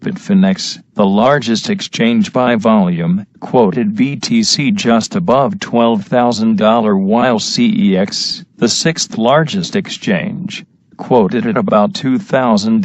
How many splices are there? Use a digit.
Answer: 1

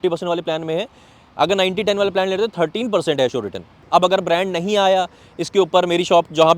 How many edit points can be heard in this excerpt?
1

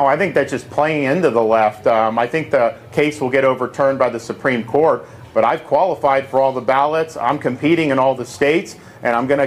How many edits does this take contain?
1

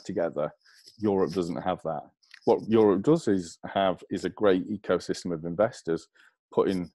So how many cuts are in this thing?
1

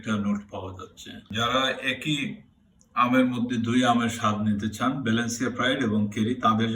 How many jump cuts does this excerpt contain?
1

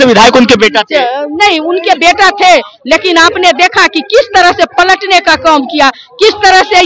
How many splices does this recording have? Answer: 0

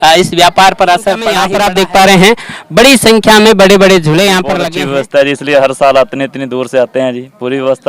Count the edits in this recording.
2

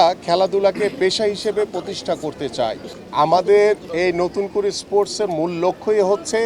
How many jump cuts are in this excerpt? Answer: 1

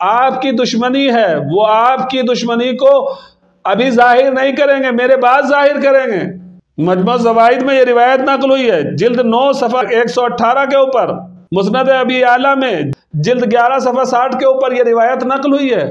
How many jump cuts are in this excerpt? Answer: 0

